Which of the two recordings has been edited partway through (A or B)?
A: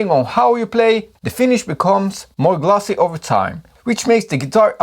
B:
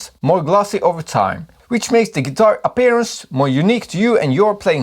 A